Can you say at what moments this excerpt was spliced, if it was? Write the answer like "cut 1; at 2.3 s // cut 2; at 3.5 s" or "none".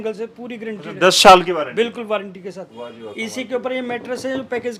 none